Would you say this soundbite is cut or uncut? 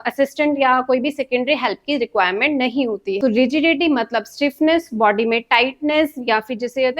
cut